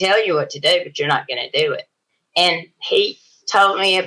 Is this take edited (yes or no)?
no